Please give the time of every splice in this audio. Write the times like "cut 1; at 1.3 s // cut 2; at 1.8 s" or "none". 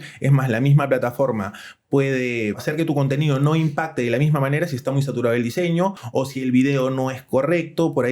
cut 1; at 2.6 s // cut 2; at 6.0 s